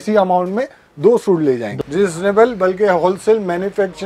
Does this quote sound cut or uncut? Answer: cut